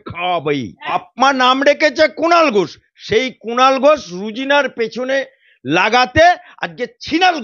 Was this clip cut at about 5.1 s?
no; 1 cut; at 0.9 s

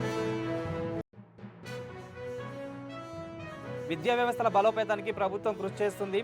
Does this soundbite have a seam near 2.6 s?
no; 1 cut; at 1.0 s

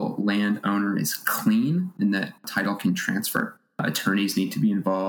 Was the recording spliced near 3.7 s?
yes; 1 cut; at 3.7 s

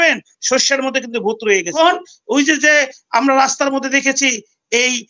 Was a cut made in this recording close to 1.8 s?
yes; 1 cut; at 1.8 s

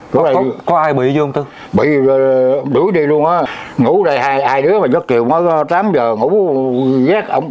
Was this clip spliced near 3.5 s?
yes; 1 cut; at 3.5 s

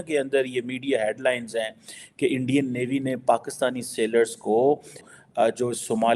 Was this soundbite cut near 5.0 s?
yes; 1 cut; at 5.0 s

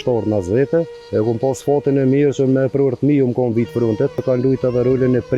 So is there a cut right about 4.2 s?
yes; 2 cuts; at 1.0 s, 4.2 s

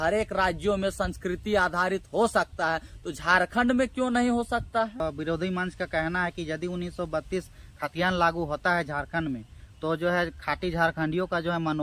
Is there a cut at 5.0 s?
yes; 1 cut; at 5.0 s

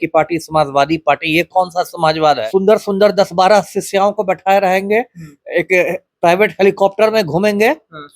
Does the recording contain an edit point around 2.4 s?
yes; 1 cut; at 2.4 s

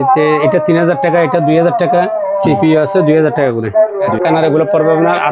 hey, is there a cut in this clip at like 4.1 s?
yes; 1 cut; at 4.1 s

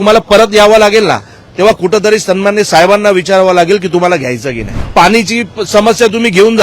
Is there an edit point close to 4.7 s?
yes; 1 cut; at 4.7 s

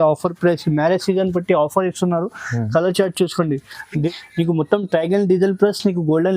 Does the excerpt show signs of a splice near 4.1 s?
yes; 1 cut; at 4.1 s

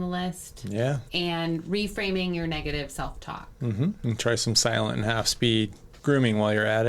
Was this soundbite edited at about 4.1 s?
no; 1 cut; at 1.0 s

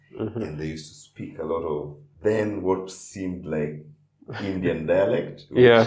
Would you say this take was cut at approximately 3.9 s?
no; 1 cut; at 2.0 s

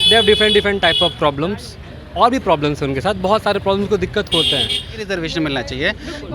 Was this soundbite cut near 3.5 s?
no; 1 cut; at 5.1 s

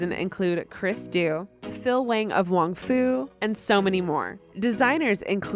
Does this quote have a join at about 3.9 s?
no; 1 cut; at 1.5 s

